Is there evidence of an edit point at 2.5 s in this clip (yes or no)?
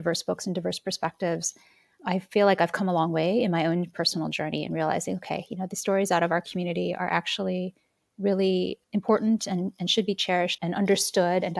no